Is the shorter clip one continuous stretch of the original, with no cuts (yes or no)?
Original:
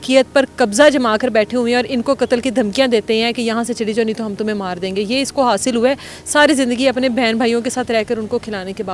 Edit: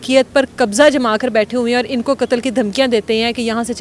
yes